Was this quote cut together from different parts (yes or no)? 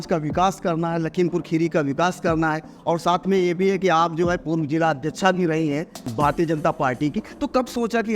yes